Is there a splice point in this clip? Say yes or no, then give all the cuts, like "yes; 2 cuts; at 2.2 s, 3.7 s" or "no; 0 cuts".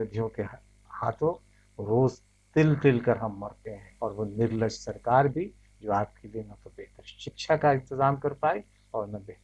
yes; 1 cut; at 3.8 s